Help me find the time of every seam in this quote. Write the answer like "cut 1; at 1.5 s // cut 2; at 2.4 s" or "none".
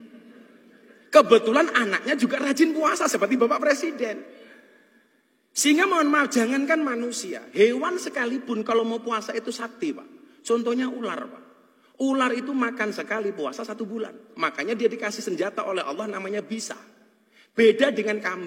none